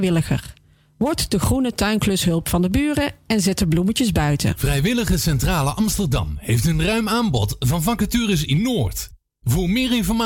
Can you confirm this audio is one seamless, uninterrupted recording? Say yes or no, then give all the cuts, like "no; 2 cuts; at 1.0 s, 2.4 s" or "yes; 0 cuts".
no; 1 cut; at 4.6 s